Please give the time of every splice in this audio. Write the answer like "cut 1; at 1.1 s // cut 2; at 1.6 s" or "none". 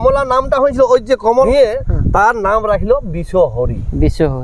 cut 1; at 1.3 s